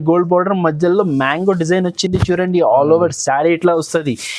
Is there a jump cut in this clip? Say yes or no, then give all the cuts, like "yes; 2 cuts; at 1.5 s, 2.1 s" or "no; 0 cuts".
no; 0 cuts